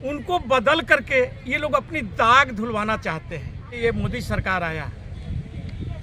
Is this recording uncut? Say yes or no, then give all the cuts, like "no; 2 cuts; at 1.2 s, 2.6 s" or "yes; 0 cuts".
no; 1 cut; at 3.8 s